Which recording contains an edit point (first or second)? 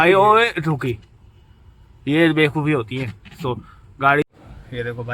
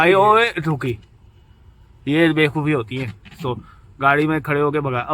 first